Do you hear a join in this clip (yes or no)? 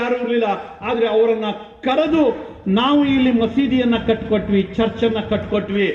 no